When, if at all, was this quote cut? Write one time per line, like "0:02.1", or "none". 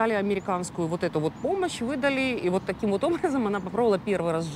none